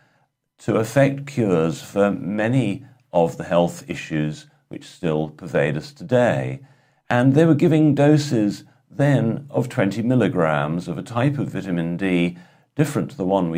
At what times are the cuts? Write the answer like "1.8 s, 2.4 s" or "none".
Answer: none